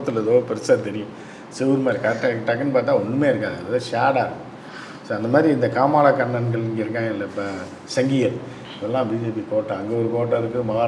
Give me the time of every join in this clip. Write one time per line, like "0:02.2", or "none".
none